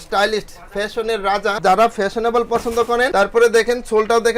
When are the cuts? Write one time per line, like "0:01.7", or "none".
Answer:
0:01.6
0:03.1